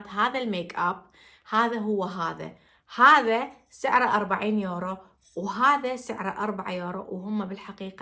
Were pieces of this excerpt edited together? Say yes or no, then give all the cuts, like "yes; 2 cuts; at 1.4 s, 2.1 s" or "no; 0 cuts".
no; 0 cuts